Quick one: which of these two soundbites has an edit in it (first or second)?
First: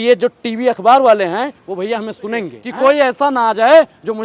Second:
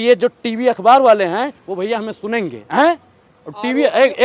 first